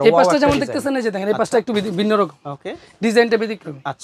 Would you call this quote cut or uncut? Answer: uncut